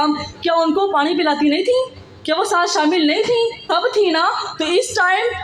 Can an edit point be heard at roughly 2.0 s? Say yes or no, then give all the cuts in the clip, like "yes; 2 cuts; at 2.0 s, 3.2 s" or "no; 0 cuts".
no; 1 cut; at 3.6 s